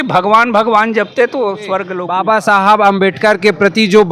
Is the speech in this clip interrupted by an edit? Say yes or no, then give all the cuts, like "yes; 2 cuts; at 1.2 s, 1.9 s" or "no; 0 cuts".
yes; 1 cut; at 2.0 s